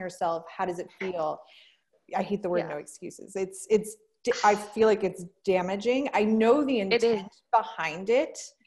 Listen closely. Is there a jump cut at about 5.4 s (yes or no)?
no